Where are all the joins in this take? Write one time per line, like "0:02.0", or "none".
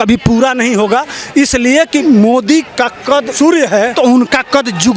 0:02.0
0:03.3
0:03.9